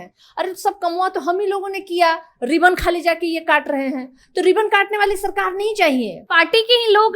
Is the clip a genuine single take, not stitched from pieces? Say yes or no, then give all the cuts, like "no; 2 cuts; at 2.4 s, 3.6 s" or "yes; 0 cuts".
no; 1 cut; at 6.2 s